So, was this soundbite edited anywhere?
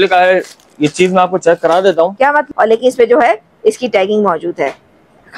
yes; 1 cut; at 2.4 s

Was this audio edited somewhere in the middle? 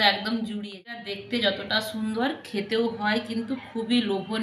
yes; 1 cut; at 1.1 s

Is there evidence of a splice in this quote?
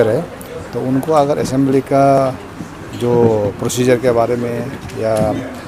no; 0 cuts

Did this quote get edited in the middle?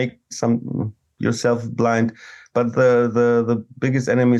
no; 0 cuts

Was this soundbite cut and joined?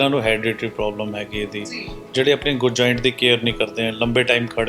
no; 0 cuts

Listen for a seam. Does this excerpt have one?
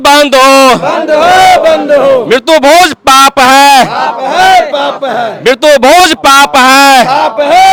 no; 0 cuts

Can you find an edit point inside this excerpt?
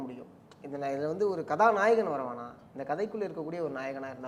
no; 0 cuts

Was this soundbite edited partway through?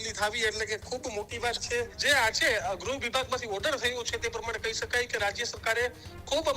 yes; 1 cut; at 2.0 s

